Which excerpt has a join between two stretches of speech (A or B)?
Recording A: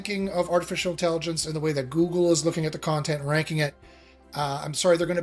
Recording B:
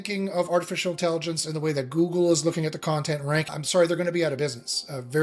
B